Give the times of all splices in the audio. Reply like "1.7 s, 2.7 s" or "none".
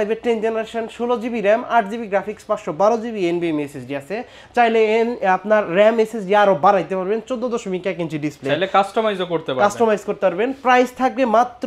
none